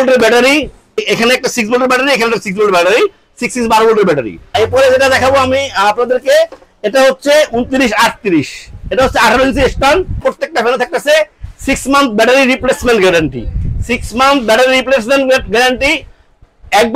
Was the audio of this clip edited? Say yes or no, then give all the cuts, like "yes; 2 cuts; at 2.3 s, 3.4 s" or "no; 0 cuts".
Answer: yes; 3 cuts; at 1.0 s, 4.5 s, 10.2 s